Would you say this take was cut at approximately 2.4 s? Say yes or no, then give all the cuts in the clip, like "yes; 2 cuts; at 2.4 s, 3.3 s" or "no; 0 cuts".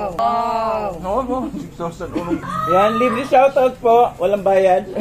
yes; 2 cuts; at 0.9 s, 2.4 s